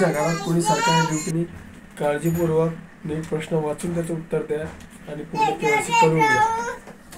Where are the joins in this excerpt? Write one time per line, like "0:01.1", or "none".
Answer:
0:01.3